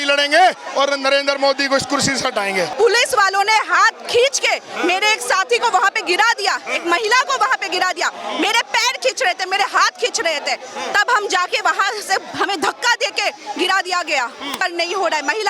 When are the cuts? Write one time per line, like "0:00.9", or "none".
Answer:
0:02.7
0:14.6